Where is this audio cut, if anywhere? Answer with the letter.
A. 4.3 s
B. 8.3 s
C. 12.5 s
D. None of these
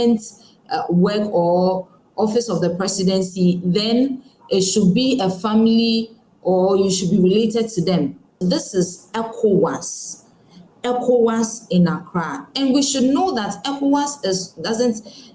B